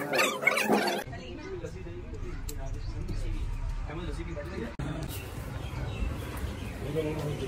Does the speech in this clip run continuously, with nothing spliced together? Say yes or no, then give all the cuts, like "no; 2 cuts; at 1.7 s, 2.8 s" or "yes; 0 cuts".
yes; 0 cuts